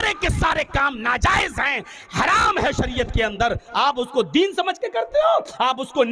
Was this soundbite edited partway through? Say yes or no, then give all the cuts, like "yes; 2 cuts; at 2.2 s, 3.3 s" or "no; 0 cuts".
no; 0 cuts